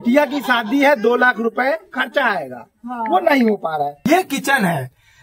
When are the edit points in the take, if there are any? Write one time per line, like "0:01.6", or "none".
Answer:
0:03.9